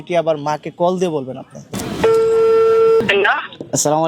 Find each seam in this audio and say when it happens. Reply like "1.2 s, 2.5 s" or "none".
1.6 s, 3.0 s